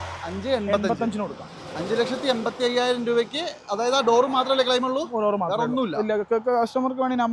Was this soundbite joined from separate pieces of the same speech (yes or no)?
no